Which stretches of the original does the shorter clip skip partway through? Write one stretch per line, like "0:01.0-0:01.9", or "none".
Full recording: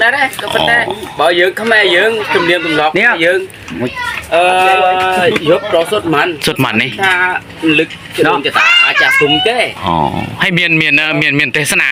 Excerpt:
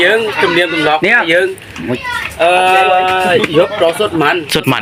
none

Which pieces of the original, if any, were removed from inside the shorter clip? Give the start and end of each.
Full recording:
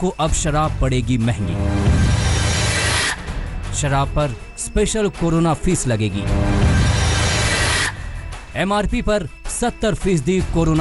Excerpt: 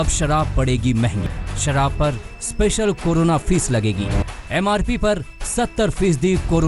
0:01.5-0:03.4
0:06.4-0:08.2

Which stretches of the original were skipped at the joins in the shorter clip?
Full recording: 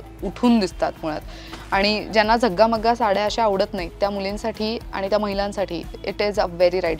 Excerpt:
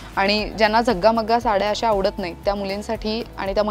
none

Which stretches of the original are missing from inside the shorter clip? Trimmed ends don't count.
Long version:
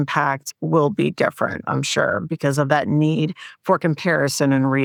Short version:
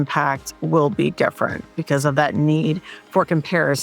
0:01.7-0:02.2

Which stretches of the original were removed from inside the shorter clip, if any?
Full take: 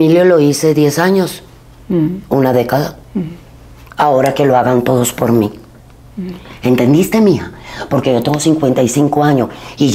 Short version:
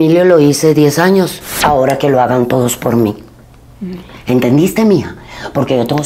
0:01.4-0:03.8

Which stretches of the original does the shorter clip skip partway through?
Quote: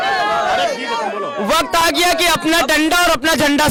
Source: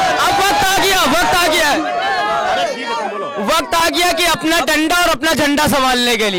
none

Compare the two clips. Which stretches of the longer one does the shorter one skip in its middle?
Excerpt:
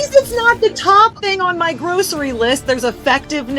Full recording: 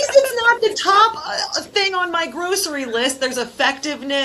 0:01.2-0:01.7

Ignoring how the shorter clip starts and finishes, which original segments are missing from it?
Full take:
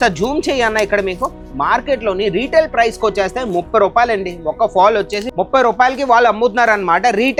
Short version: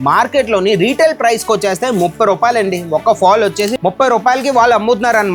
none

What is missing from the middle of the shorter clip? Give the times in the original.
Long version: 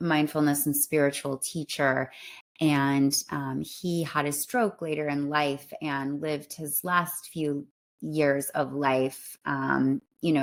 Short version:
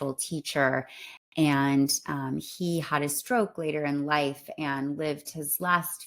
none

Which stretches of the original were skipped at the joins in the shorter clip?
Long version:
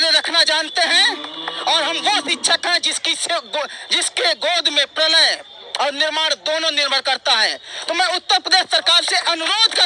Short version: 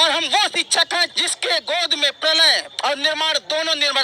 0:02.9-0:03.9
0:05.4-0:05.6

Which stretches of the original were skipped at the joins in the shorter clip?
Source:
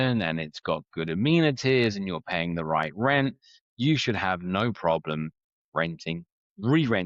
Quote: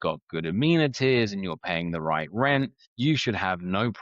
0:03.5-0:03.6

